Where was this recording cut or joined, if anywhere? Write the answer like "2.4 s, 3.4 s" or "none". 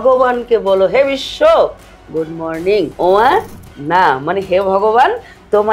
2.9 s